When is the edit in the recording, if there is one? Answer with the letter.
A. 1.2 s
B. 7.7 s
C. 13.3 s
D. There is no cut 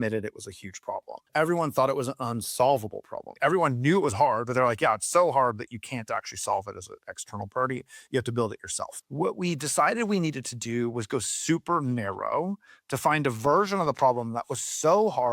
A